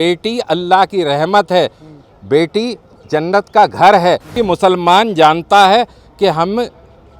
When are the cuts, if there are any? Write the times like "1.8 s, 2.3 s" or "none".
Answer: 4.4 s